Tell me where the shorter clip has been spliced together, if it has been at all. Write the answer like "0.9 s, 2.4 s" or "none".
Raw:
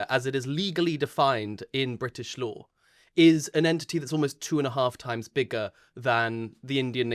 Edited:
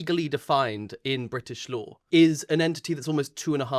2.0 s

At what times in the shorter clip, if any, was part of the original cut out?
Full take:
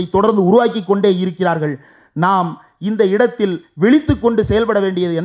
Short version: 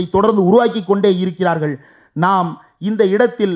none

